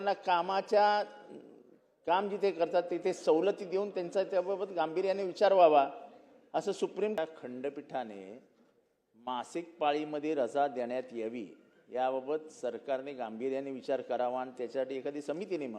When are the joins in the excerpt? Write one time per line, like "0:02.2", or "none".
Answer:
0:07.2